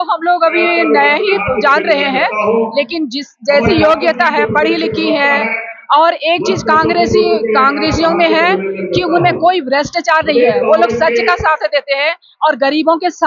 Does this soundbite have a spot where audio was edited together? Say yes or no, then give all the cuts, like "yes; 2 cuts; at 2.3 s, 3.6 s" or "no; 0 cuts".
no; 0 cuts